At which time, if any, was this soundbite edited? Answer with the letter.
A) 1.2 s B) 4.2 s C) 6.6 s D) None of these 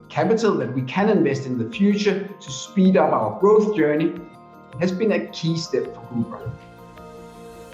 C